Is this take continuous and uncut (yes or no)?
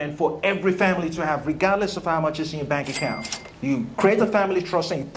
yes